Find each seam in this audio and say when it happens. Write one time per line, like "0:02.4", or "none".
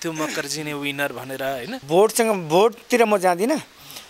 0:01.8